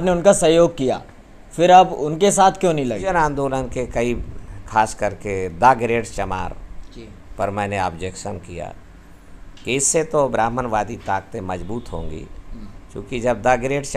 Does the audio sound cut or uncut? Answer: cut